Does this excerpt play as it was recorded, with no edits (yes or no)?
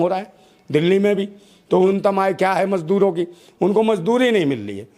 no